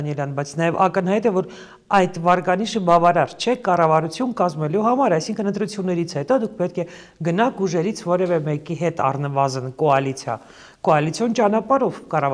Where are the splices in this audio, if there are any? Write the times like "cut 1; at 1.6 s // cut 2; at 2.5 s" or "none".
none